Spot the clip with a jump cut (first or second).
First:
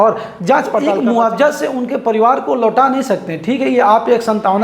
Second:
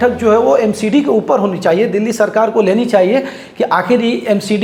first